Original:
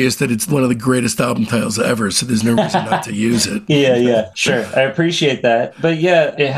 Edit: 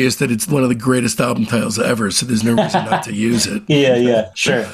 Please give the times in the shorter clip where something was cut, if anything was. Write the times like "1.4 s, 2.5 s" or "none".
none